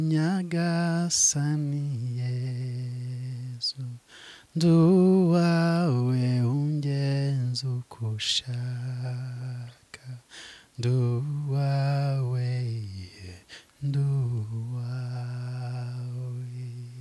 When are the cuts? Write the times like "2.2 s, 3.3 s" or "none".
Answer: none

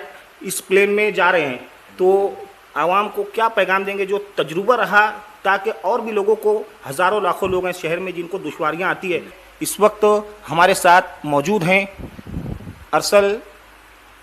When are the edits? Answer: 9.4 s

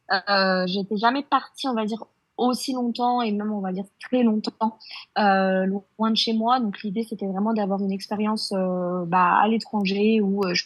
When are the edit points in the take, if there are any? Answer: none

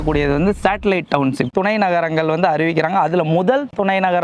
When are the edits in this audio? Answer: 1.5 s

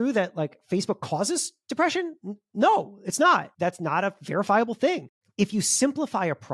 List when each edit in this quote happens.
3.5 s, 5.2 s

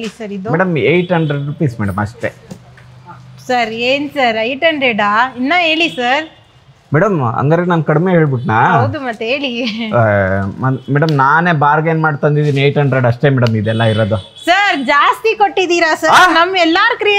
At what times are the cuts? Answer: none

